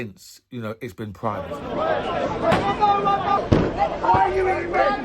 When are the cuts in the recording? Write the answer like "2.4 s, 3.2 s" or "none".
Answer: 1.6 s